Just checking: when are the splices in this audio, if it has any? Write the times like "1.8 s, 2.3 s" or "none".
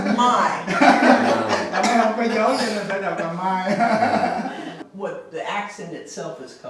4.8 s